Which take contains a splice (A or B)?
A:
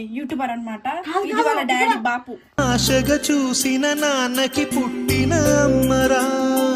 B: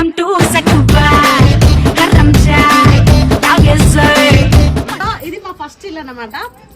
B